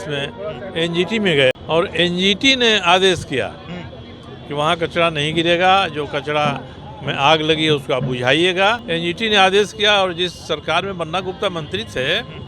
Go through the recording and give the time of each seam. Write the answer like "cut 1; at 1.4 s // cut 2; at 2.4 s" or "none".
cut 1; at 1.6 s // cut 2; at 8.8 s